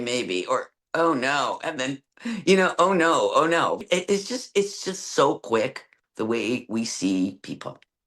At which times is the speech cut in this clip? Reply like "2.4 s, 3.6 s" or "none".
3.8 s